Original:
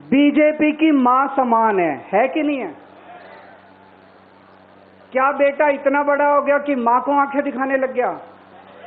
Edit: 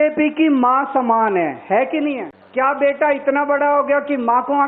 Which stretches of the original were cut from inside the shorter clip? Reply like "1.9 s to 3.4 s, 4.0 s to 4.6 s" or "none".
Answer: 2.8 s to 4.9 s